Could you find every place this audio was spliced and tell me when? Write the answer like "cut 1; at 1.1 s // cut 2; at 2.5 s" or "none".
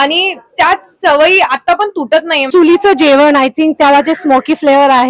cut 1; at 2.5 s